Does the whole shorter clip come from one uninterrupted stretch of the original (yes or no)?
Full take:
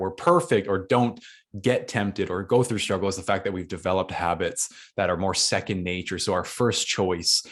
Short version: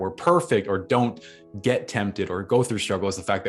yes